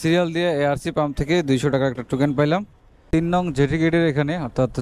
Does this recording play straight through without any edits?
no; 1 cut; at 3.1 s

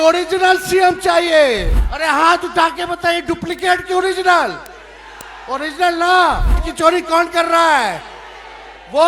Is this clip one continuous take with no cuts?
no; 2 cuts; at 1.8 s, 6.7 s

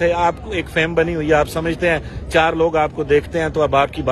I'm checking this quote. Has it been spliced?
no; 0 cuts

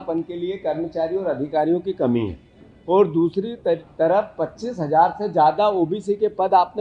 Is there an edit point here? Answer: no; 0 cuts

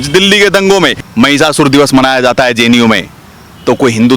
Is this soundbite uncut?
no; 1 cut; at 1.0 s

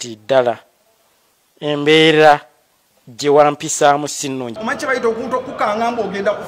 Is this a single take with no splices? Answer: no; 1 cut; at 4.6 s

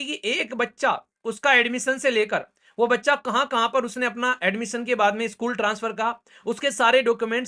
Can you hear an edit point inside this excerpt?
no; 0 cuts

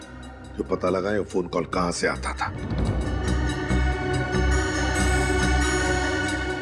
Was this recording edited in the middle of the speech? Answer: yes; 1 cut; at 3.0 s

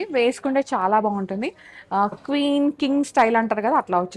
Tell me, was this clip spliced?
no; 0 cuts

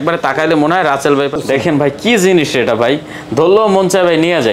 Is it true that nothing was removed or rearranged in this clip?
no; 1 cut; at 1.4 s

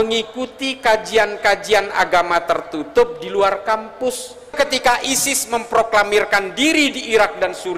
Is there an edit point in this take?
yes; 1 cut; at 4.5 s

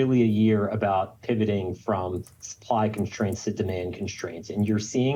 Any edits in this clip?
no; 0 cuts

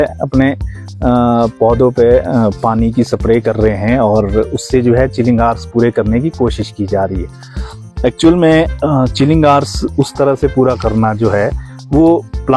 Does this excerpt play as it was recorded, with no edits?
yes; 0 cuts

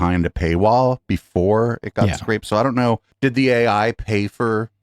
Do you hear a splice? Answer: no; 0 cuts

